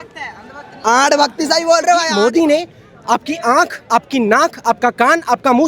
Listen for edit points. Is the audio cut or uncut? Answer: cut